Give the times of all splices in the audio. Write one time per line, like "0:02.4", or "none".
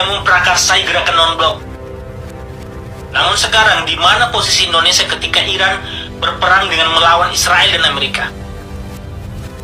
0:08.0